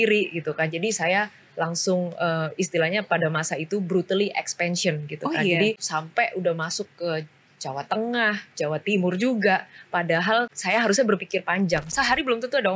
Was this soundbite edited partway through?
yes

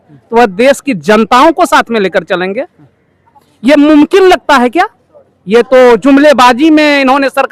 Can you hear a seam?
no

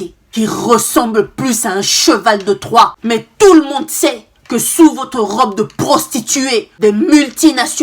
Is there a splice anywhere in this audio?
yes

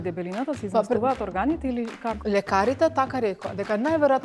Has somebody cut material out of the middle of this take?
yes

